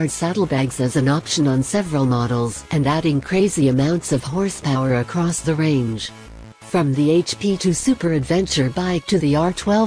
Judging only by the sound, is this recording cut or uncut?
cut